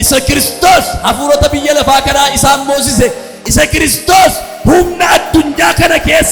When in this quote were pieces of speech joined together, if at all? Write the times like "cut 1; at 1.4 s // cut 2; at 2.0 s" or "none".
none